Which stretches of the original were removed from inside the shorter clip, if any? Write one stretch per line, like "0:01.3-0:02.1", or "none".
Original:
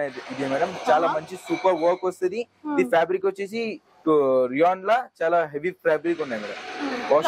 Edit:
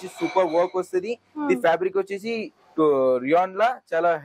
none

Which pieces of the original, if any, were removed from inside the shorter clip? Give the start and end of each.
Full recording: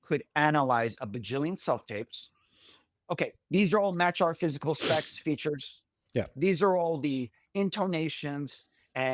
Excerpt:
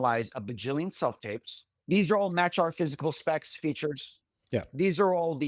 0:02.4-0:03.4

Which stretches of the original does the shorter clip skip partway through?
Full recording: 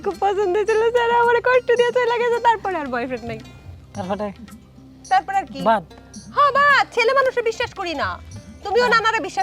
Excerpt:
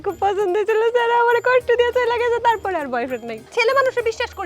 0:03.5-0:06.9

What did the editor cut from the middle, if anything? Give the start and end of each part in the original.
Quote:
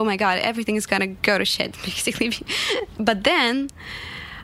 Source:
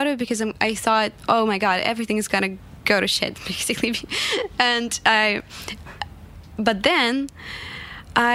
0:02.6-0:02.8
0:04.5-0:06.5

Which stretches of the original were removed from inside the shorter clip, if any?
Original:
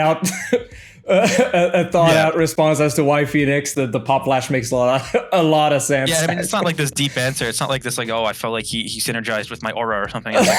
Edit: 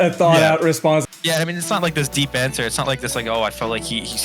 0:02.8-0:05.8

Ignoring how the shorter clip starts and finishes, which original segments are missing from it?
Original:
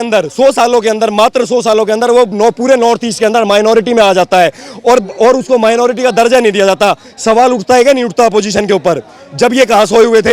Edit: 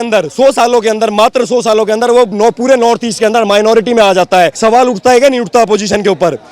0:04.6-0:07.2

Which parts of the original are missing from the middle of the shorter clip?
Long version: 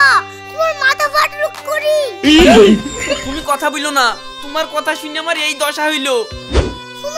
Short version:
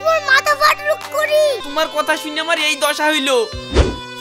0:02.1-0:04.4

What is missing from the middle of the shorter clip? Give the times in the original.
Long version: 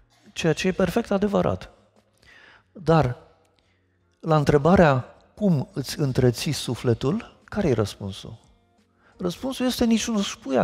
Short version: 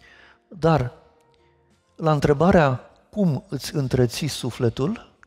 none

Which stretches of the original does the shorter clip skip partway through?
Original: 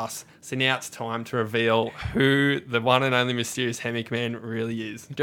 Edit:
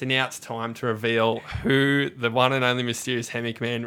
none

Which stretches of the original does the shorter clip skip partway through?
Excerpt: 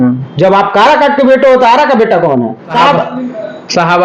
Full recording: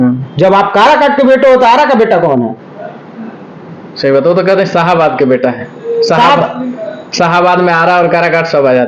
0:02.7-0:06.2

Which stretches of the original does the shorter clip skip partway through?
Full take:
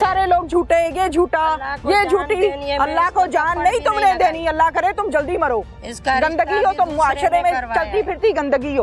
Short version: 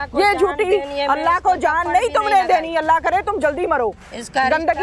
none

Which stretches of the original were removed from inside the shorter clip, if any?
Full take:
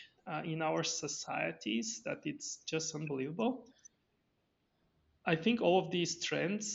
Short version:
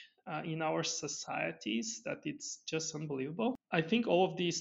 0:03.6-0:05.2

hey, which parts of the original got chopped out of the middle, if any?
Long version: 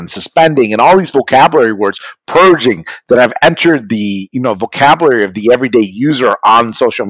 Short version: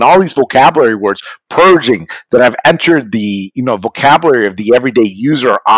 none

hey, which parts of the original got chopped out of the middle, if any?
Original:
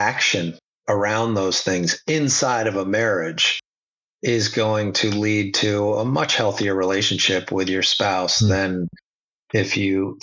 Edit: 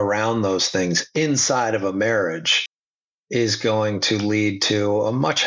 none

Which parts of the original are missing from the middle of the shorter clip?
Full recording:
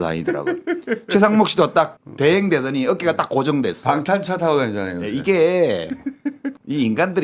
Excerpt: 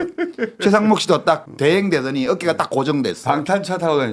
0:02.0-0:02.1

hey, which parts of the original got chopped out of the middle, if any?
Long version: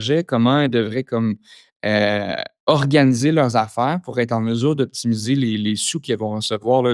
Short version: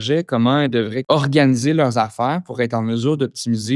0:01.0-0:02.6

